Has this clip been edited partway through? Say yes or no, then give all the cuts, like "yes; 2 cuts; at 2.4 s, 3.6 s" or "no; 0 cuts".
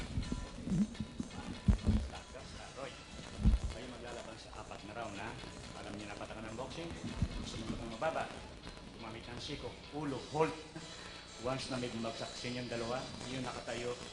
yes; 1 cut; at 10.1 s